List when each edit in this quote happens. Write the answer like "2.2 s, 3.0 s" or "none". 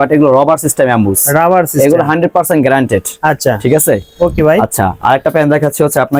none